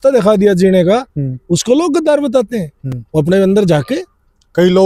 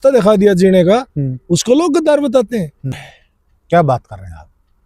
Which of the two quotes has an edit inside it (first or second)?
second